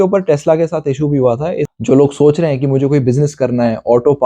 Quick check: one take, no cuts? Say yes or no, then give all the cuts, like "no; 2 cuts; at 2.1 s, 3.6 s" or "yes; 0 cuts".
no; 1 cut; at 1.7 s